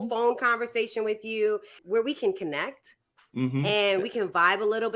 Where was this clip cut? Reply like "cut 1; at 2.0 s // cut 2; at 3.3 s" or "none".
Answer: cut 1; at 1.8 s

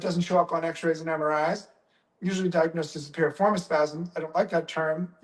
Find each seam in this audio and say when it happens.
none

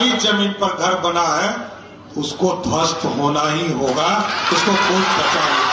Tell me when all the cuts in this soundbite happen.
none

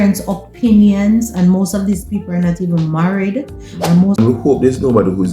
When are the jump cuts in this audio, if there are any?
cut 1; at 4.2 s

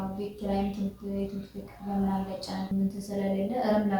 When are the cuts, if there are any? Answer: cut 1; at 2.7 s

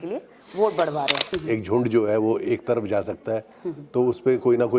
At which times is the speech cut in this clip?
cut 1; at 1.3 s

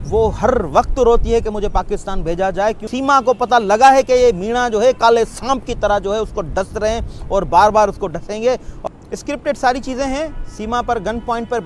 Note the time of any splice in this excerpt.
cut 1; at 2.9 s // cut 2; at 8.7 s

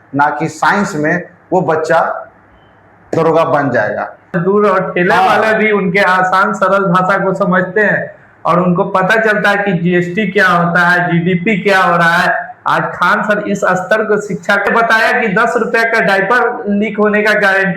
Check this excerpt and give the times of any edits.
cut 1; at 4.4 s // cut 2; at 14.7 s

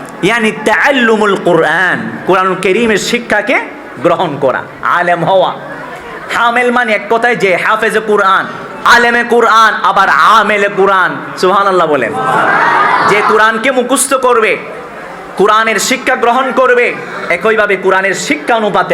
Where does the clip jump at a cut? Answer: cut 1; at 8.8 s

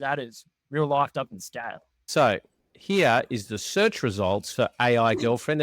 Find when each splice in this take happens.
cut 1; at 2.1 s

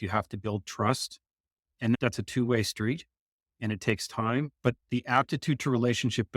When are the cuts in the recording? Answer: none

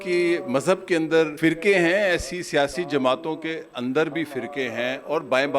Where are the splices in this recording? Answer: cut 1; at 1.3 s

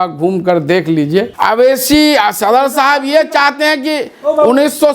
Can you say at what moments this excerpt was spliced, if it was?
cut 1; at 1.4 s

